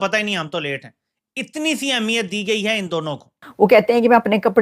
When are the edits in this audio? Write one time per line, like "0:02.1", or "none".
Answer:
0:03.4